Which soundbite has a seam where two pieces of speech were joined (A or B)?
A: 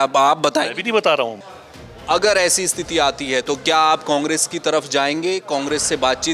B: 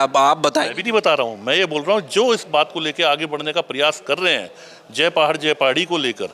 A